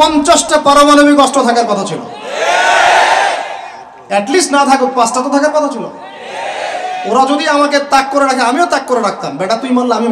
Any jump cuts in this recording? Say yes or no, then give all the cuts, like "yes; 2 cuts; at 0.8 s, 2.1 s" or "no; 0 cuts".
no; 0 cuts